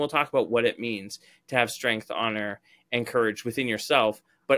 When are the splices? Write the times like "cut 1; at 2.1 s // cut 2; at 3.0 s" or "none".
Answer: none